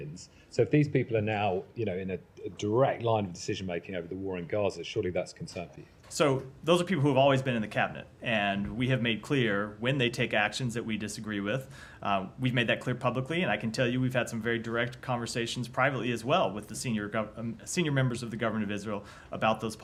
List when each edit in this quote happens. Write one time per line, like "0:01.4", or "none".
none

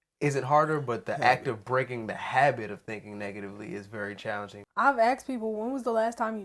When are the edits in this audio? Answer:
0:04.5

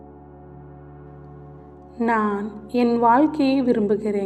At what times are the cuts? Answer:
0:02.0

